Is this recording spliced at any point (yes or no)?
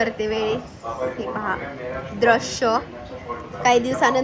no